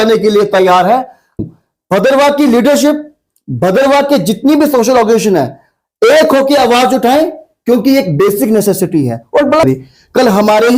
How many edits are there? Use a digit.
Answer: 2